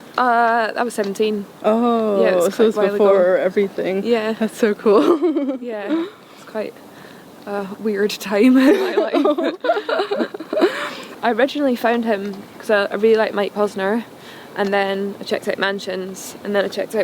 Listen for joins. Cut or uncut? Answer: cut